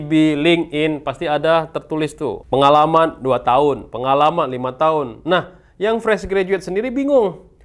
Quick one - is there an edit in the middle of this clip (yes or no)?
yes